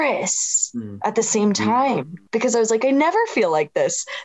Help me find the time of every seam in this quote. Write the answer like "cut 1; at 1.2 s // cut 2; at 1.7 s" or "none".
cut 1; at 2.1 s